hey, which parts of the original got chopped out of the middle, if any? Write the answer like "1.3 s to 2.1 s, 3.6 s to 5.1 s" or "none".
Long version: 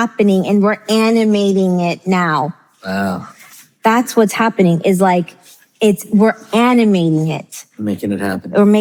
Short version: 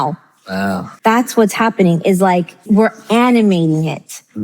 3.3 s to 3.7 s, 5.4 s to 6.0 s